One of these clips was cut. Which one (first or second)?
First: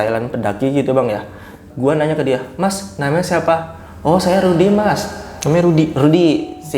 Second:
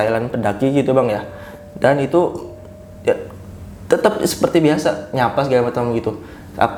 first